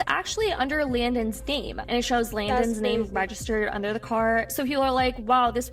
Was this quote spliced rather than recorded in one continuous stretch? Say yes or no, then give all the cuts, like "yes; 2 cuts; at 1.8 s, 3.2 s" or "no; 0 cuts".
no; 0 cuts